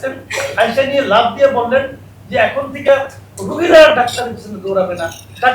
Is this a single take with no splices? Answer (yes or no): yes